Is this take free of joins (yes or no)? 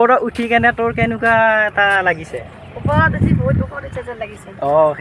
yes